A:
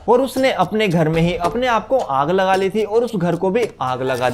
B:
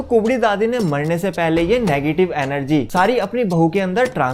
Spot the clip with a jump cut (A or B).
B